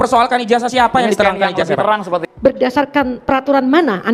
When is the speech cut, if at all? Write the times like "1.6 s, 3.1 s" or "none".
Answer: 2.2 s